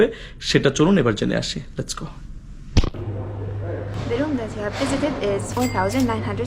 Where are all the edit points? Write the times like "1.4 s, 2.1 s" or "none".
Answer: 3.9 s, 5.5 s